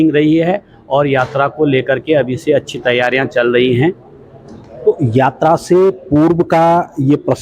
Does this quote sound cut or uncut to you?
uncut